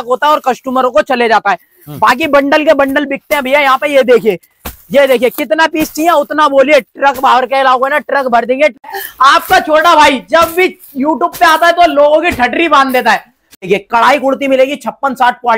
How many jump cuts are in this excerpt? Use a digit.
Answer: 2